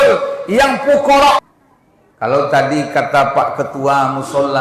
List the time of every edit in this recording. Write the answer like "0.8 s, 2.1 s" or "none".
1.4 s